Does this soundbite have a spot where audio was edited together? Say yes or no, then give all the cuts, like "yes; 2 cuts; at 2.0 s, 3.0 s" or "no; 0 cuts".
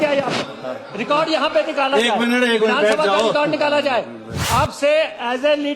yes; 1 cut; at 4.3 s